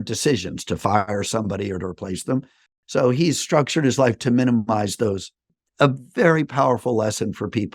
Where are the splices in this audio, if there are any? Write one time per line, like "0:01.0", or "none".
0:02.6
0:05.5